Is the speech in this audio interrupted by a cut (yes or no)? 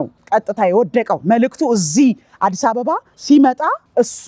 no